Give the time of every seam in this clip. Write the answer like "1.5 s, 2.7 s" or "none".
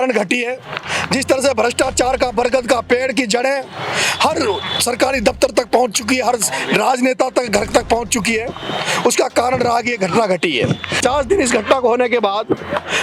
11.0 s